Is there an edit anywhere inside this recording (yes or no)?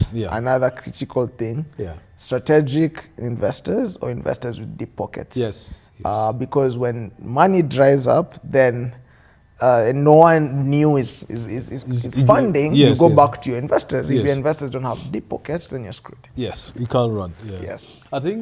no